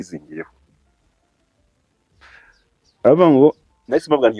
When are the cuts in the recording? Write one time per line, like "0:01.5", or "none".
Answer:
none